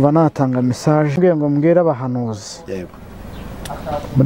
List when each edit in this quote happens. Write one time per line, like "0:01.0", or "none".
0:01.2